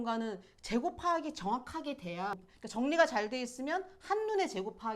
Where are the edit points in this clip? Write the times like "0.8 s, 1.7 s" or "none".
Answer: 2.4 s